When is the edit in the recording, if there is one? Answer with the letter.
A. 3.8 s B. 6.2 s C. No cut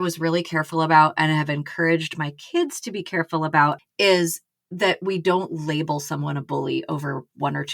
A